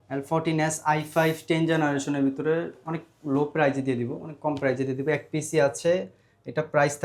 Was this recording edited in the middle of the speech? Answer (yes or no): no